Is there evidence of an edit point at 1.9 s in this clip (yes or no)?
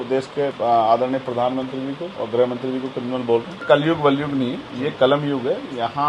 no